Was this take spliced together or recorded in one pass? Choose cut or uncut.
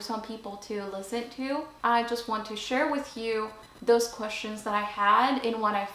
cut